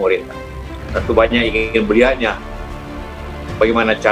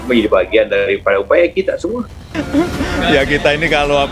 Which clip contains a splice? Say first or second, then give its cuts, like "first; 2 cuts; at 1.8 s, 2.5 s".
second; 1 cut; at 2.2 s